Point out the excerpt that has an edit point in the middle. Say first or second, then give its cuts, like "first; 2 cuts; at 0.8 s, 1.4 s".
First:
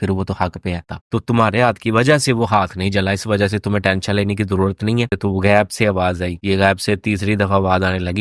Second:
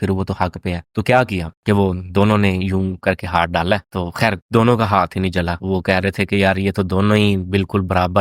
first; 2 cuts; at 0.9 s, 5.1 s